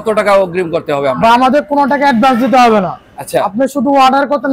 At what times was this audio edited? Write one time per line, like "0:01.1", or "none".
none